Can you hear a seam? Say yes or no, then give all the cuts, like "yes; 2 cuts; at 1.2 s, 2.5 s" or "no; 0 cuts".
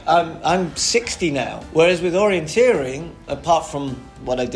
yes; 2 cuts; at 1.6 s, 3.3 s